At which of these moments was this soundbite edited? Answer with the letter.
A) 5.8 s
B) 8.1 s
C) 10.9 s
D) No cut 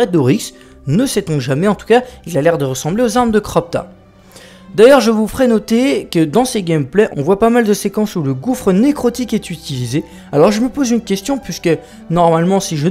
A